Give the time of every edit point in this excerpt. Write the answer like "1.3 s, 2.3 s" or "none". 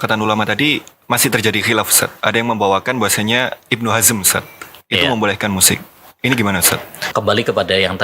7.0 s